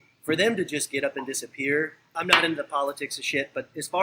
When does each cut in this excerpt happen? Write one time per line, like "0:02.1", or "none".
0:02.1